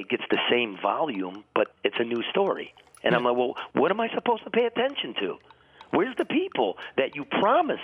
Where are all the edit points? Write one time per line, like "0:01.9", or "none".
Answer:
0:01.7